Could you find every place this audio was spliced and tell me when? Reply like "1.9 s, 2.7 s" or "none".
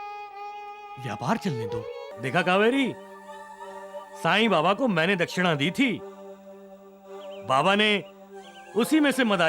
2.1 s